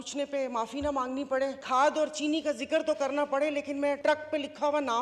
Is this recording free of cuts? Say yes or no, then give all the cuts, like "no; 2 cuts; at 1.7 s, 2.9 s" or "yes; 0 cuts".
no; 2 cuts; at 1.6 s, 4.0 s